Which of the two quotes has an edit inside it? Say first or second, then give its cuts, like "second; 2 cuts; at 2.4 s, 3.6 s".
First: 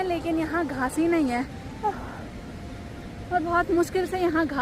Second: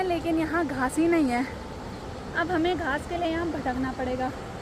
first; 1 cut; at 1.6 s